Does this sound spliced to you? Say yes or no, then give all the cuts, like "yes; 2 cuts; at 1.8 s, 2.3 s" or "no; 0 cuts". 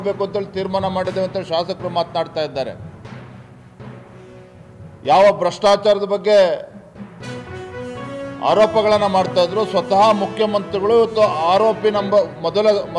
yes; 4 cuts; at 2.8 s, 4.3 s, 6.8 s, 8.1 s